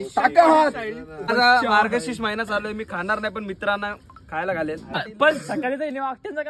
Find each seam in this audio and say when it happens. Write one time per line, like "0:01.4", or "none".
0:01.3
0:05.0